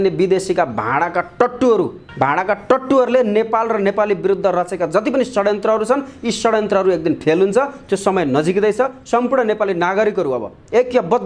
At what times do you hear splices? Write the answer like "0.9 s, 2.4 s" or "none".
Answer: 2.0 s